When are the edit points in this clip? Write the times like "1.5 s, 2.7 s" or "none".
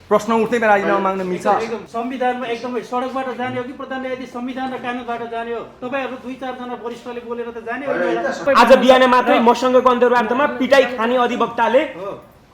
1.9 s, 8.4 s